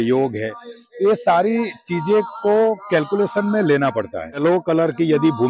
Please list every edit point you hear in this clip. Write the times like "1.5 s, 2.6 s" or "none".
4.4 s